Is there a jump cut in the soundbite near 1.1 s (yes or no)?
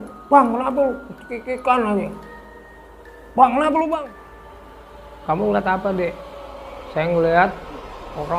no